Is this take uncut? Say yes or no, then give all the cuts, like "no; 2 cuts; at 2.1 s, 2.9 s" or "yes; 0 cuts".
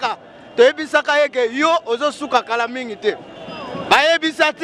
yes; 0 cuts